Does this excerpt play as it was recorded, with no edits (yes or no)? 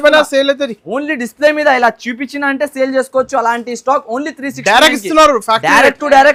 yes